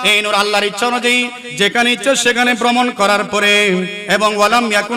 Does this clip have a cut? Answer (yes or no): yes